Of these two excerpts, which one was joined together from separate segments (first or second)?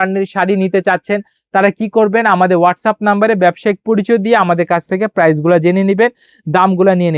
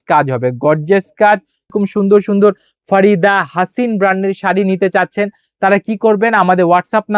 second